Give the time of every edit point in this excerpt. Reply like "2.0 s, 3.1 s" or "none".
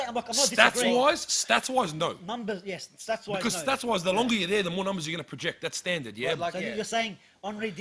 none